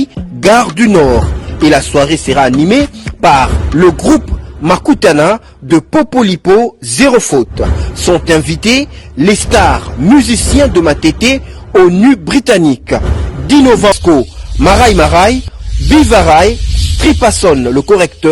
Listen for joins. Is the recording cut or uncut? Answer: cut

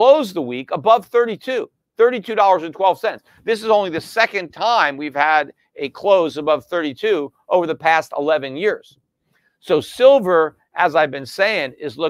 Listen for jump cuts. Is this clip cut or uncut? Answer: uncut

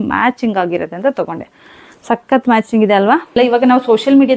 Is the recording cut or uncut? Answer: cut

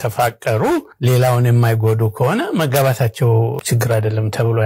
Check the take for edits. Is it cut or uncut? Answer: cut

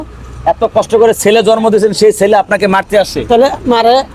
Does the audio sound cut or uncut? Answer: uncut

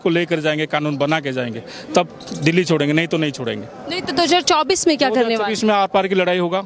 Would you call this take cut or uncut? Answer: uncut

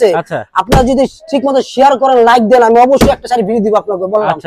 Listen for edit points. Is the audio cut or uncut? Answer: uncut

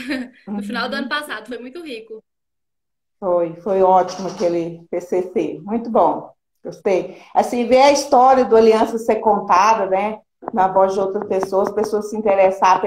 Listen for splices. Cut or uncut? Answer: cut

